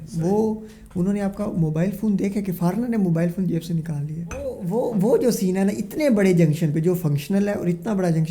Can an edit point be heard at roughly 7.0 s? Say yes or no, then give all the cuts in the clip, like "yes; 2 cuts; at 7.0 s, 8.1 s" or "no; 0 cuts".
no; 1 cut; at 4.6 s